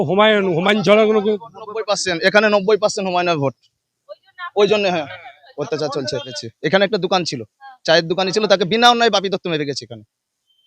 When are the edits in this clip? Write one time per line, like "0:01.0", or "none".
0:06.4